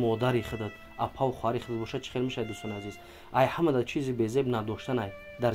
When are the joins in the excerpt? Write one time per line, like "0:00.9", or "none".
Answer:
none